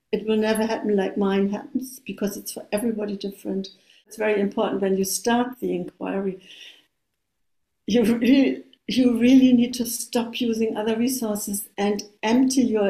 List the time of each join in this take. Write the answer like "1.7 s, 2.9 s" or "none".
4.1 s